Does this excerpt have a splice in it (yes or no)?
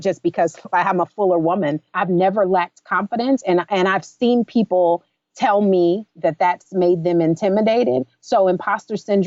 yes